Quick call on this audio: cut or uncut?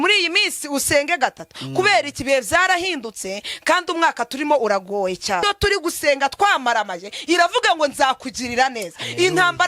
cut